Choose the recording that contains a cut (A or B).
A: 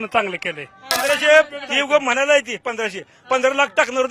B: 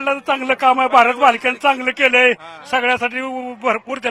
A